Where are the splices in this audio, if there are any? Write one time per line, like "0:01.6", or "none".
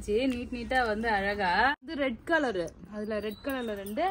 0:01.9